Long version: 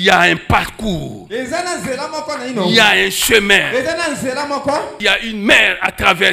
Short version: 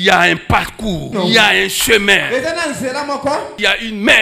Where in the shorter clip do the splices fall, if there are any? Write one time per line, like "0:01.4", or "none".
0:01.1